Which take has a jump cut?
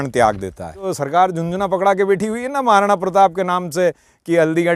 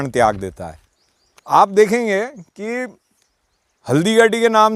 first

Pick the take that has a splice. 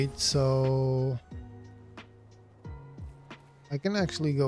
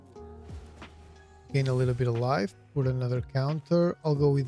first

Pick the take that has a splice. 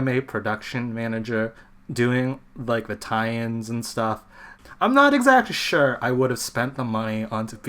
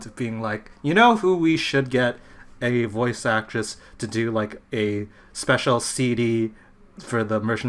first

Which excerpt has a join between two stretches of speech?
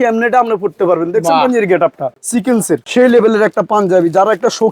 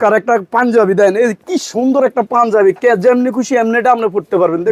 first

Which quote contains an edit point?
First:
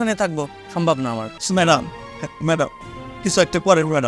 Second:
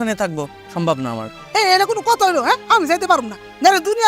first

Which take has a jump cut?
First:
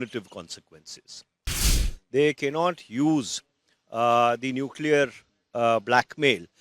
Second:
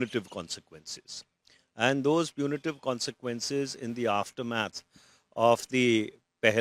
first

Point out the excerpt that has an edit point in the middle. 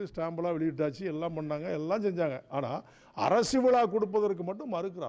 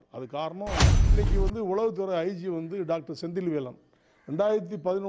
second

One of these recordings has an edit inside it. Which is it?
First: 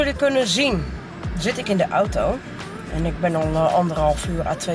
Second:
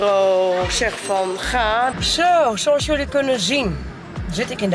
second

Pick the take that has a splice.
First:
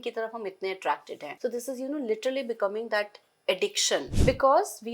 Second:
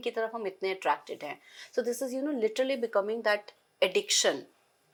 first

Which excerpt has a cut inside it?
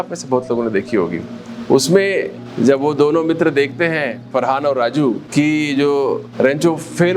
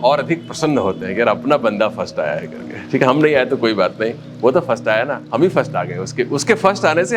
first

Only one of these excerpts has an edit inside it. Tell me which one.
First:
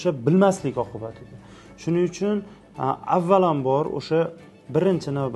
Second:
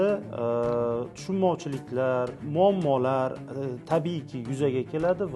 second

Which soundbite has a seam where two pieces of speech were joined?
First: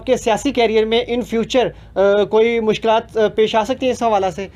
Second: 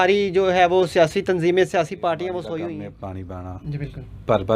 second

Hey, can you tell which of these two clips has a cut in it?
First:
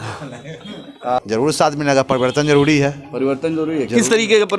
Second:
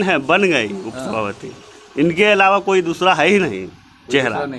first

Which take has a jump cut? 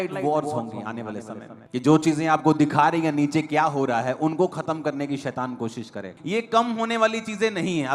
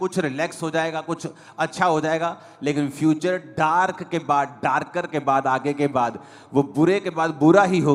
first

